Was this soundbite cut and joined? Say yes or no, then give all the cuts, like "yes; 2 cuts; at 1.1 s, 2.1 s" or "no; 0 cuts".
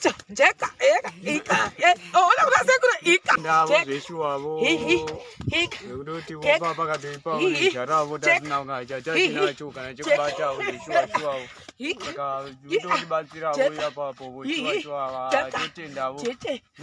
yes; 1 cut; at 3.4 s